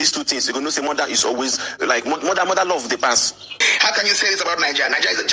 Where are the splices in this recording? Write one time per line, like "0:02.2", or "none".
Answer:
0:03.6